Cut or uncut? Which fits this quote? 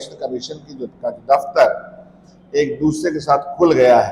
uncut